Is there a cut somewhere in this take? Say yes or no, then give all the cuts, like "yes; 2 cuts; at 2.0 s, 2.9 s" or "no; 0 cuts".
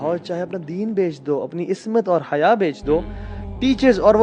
no; 0 cuts